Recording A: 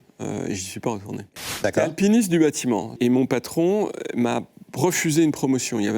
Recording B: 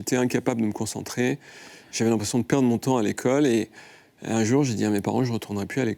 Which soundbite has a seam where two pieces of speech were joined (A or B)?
A